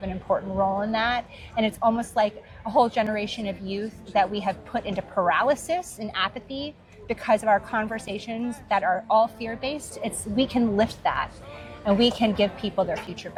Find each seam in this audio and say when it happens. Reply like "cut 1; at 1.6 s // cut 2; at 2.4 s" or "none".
none